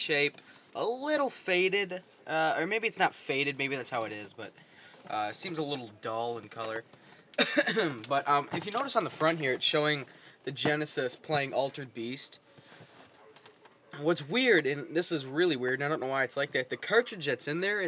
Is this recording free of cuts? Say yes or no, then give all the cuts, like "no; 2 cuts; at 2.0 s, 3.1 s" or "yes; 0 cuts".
yes; 0 cuts